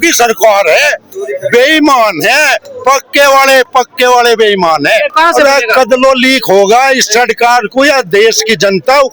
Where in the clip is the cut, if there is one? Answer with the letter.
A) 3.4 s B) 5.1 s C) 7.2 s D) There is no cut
B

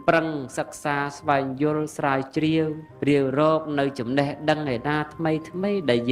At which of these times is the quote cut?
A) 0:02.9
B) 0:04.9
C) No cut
A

